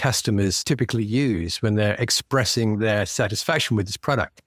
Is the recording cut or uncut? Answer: uncut